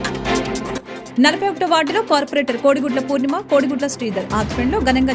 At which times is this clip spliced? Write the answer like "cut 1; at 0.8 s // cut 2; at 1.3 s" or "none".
cut 1; at 1.0 s

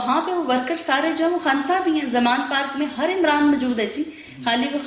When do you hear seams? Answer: none

